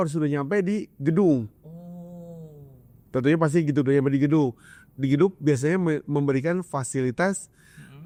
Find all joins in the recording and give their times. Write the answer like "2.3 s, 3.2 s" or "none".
none